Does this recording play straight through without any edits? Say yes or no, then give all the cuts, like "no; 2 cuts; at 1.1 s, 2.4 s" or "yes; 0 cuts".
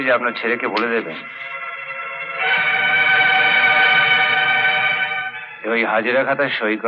yes; 0 cuts